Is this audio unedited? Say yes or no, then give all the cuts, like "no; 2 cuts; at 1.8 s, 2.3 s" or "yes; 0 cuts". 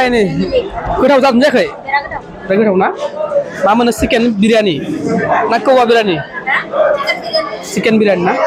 yes; 0 cuts